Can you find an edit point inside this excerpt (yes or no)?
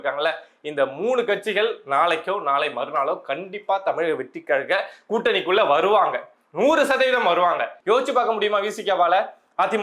yes